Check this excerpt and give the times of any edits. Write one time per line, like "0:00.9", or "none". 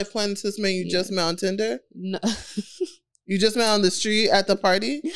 none

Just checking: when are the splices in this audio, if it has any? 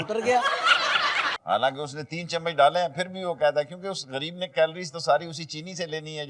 0:01.3

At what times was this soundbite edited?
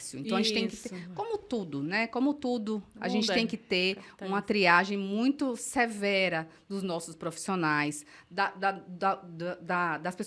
none

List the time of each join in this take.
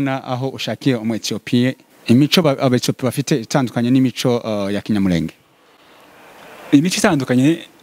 0:01.9

